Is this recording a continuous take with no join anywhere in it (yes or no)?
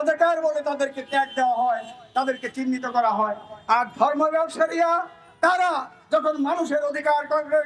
yes